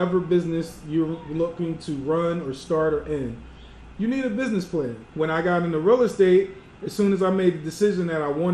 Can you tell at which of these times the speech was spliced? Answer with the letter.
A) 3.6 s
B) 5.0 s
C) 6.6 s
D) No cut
B